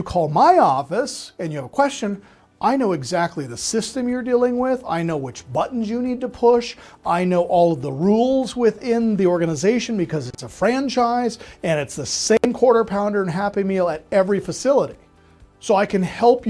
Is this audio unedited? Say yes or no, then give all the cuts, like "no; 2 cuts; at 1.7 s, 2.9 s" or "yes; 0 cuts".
yes; 0 cuts